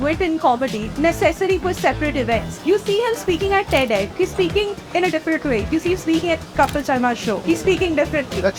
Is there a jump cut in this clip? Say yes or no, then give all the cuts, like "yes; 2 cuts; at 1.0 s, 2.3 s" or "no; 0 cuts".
yes; 5 cuts; at 0.8 s, 2.5 s, 4.1 s, 5.7 s, 7.4 s